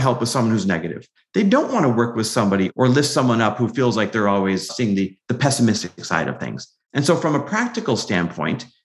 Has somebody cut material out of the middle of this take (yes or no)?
yes